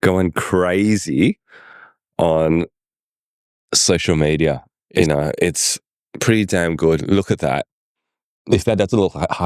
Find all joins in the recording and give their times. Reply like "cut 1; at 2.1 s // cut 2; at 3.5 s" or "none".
cut 1; at 5.0 s